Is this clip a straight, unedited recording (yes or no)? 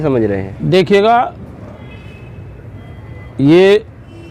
yes